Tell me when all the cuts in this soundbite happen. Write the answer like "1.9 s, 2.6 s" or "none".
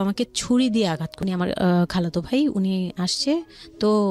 1.1 s